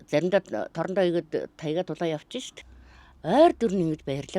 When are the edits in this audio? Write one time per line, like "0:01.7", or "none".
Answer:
0:02.6